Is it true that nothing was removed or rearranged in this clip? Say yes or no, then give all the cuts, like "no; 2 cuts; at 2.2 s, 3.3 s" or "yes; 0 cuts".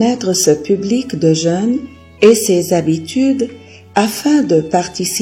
no; 1 cut; at 2.0 s